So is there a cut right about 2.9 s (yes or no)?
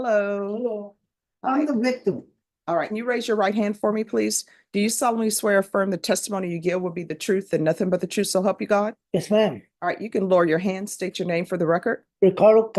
yes